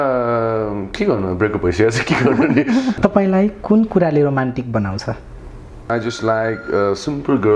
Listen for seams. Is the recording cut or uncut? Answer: cut